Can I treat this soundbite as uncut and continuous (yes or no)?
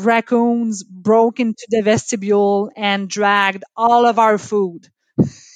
yes